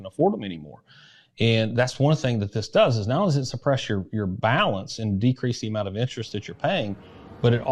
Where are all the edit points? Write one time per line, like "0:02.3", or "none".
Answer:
none